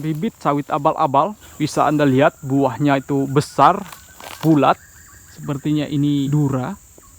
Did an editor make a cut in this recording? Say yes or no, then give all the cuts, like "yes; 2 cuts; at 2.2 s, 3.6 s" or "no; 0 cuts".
yes; 2 cuts; at 1.4 s, 6.3 s